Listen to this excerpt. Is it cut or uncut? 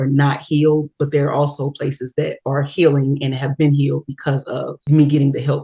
cut